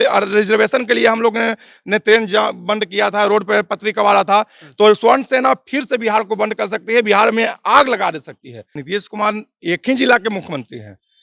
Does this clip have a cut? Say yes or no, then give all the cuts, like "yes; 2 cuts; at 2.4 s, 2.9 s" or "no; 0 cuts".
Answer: yes; 1 cut; at 8.7 s